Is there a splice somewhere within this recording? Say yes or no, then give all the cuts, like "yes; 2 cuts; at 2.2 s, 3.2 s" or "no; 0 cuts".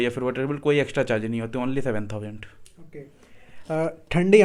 no; 0 cuts